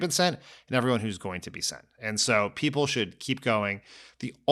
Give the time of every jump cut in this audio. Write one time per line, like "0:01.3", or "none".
none

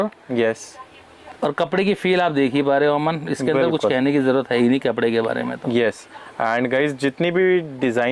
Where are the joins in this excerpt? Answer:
none

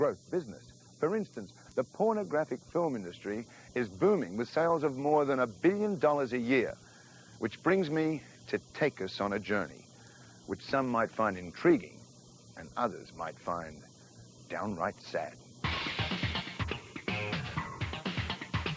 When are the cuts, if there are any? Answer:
0:05.9

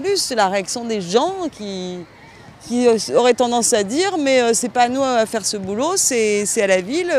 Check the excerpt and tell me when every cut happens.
none

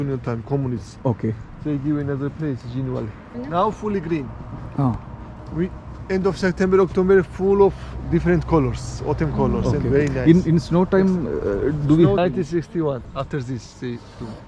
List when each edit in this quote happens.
0:12.2

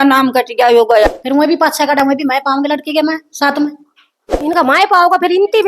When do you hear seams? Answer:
0:01.1
0:04.3

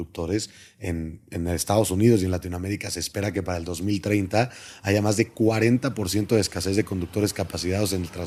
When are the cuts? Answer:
none

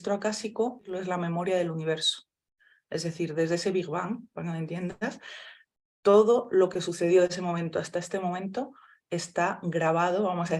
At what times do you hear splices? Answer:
0:00.9

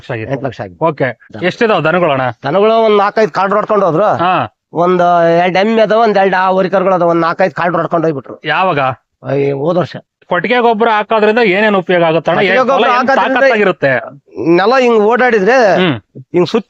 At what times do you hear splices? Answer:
0:01.3
0:10.2

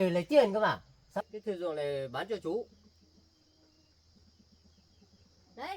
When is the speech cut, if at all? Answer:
0:01.2

